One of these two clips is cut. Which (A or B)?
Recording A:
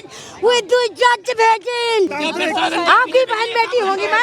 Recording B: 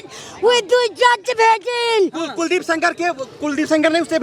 A